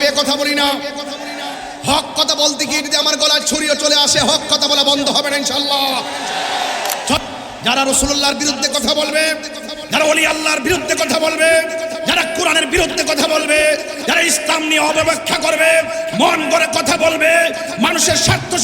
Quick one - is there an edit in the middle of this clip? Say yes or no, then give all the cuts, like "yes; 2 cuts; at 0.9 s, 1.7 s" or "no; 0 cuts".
yes; 1 cut; at 7.3 s